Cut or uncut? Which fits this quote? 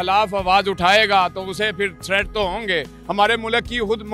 cut